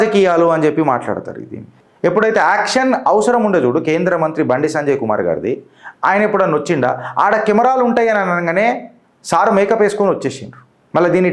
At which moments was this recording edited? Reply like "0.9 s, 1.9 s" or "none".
none